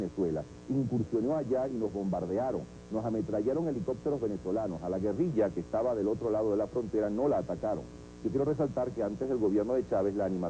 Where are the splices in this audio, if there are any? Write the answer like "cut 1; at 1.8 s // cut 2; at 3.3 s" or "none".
cut 1; at 5.3 s